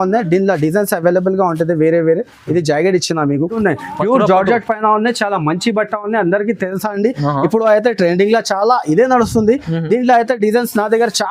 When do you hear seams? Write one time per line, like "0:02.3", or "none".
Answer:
0:03.6